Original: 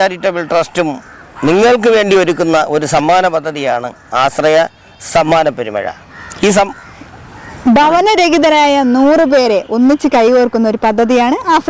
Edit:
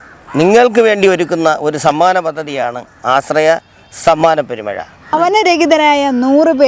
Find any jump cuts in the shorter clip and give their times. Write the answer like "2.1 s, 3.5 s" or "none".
5.1 s